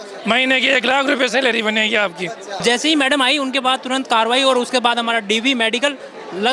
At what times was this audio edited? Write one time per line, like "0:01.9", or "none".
0:02.6